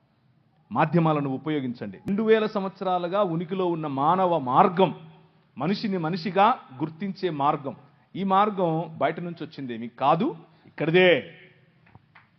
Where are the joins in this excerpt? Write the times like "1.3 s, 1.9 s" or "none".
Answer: 2.0 s